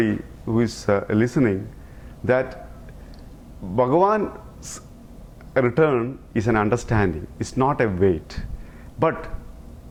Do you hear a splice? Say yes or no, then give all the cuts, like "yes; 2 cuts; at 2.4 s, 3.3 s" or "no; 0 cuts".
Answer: no; 0 cuts